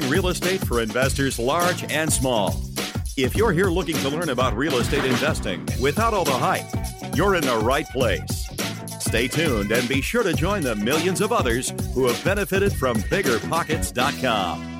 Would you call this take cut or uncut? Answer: uncut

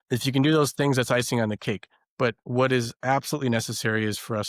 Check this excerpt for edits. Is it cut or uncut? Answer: cut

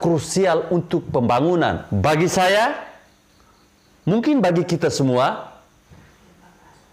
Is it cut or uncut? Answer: cut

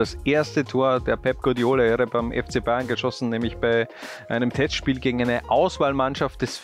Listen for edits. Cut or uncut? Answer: uncut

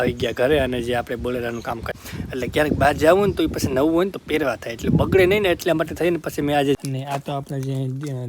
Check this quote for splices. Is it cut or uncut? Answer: cut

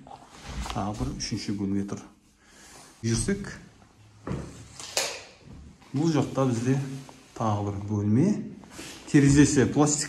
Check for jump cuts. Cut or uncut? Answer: cut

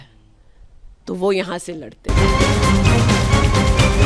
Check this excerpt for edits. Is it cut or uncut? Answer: cut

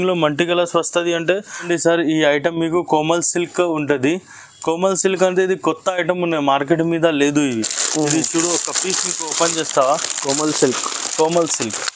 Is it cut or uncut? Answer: cut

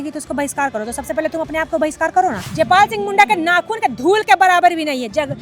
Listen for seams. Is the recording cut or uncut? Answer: cut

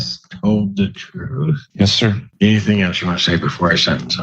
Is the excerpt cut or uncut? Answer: cut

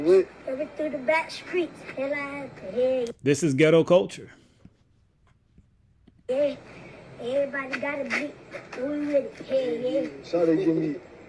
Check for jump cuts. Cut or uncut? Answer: uncut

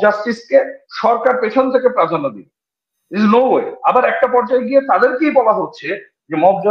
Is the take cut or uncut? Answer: uncut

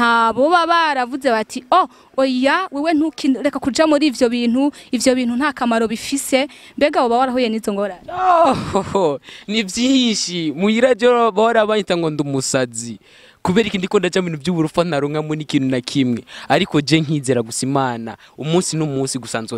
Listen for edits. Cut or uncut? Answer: uncut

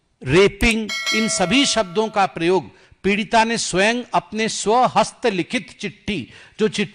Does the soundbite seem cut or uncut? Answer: uncut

